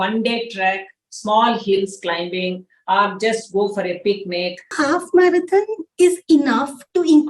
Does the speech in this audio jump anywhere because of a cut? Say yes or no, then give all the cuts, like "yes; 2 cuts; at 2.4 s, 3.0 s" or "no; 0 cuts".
yes; 1 cut; at 4.7 s